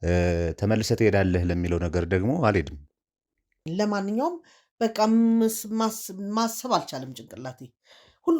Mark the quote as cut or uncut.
cut